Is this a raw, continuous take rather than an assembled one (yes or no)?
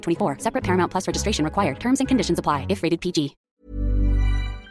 no